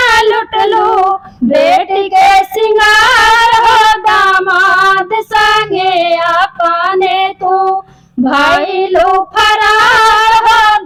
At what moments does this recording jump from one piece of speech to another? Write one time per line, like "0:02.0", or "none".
none